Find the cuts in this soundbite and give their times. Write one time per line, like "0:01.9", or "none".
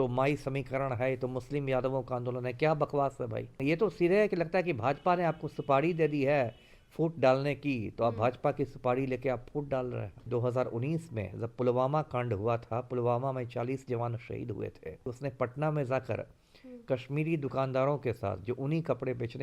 0:03.6
0:10.3
0:15.1